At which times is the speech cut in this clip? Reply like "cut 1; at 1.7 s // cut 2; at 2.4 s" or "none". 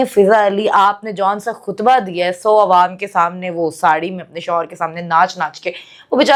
none